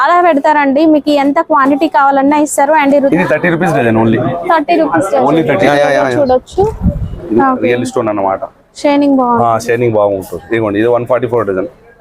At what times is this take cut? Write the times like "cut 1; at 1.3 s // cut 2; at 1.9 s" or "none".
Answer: cut 1; at 3.1 s // cut 2; at 5.7 s // cut 3; at 7.2 s